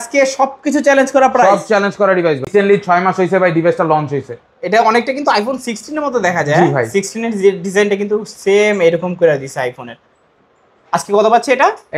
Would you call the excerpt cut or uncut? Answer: cut